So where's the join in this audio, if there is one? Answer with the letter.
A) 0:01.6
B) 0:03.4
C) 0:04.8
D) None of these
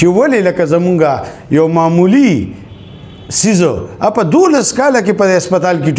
D